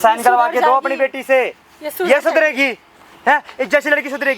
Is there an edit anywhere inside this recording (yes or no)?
no